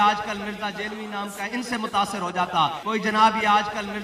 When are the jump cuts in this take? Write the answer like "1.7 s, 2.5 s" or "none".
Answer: none